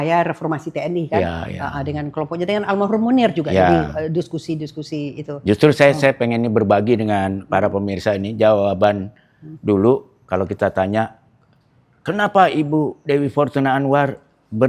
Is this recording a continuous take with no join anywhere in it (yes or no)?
yes